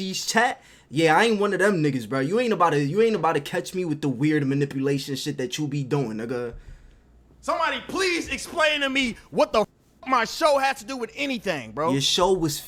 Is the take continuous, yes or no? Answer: yes